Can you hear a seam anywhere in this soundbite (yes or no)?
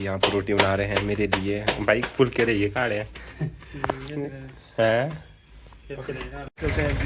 no